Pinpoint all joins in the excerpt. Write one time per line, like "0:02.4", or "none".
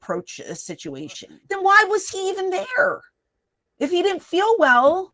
0:01.3

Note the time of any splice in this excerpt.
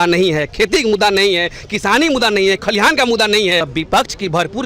0:03.7

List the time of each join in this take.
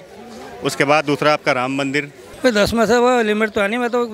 0:02.2

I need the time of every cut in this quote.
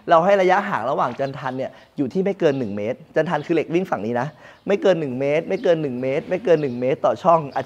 none

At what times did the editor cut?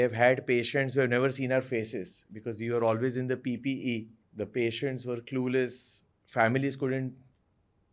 0:04.2

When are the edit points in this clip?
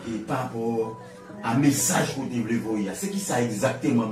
none

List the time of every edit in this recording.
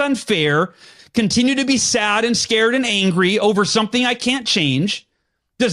none

